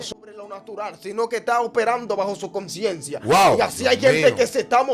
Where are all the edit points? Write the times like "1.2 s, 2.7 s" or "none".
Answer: none